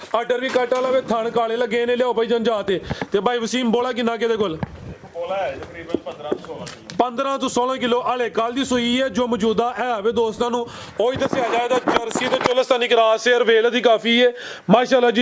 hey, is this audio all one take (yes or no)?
yes